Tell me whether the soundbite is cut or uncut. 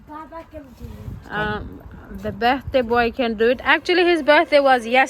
uncut